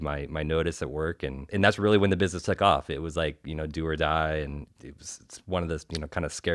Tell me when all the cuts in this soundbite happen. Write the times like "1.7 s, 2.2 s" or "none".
1.4 s

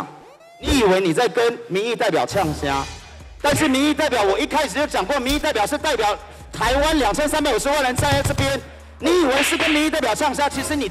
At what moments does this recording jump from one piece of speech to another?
none

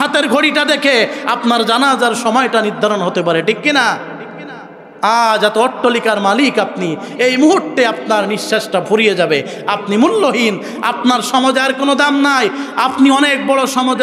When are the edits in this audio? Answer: none

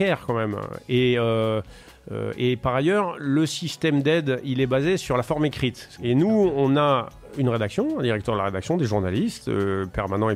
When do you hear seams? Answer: 5.9 s

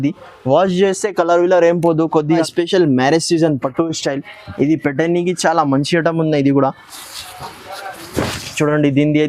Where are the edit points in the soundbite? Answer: 2.4 s

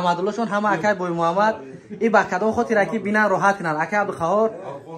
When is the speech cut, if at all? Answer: none

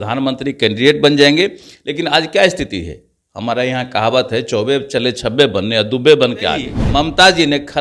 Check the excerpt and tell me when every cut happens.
6.8 s

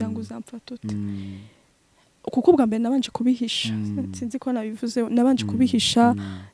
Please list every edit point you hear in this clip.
none

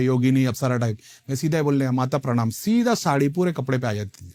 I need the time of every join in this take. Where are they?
none

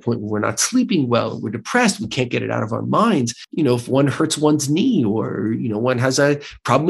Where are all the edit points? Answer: 3.4 s

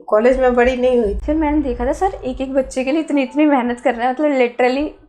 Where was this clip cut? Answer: 1.2 s

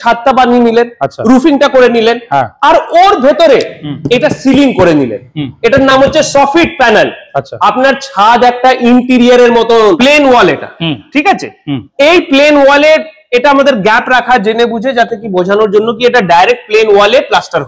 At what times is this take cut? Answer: 10.0 s

